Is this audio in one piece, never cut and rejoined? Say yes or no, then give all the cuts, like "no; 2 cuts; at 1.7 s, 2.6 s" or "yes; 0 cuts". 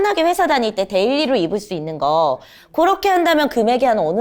yes; 0 cuts